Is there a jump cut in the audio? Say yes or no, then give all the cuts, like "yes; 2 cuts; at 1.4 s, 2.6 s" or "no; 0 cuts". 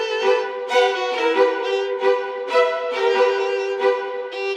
no; 0 cuts